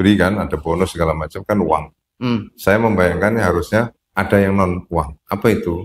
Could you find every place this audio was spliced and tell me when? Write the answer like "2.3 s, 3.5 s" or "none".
4.0 s